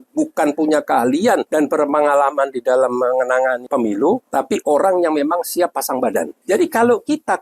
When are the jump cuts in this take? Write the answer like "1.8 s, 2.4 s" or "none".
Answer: 1.5 s, 3.6 s, 4.2 s, 6.3 s